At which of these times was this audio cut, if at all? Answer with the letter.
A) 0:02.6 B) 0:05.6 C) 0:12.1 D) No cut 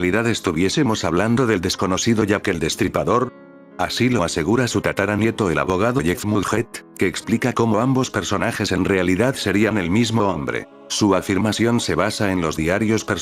B